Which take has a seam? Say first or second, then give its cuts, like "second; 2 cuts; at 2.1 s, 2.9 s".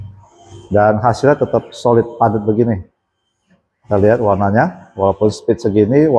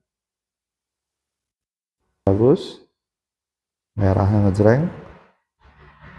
second; 1 cut; at 2.3 s